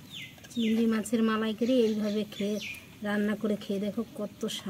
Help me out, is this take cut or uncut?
uncut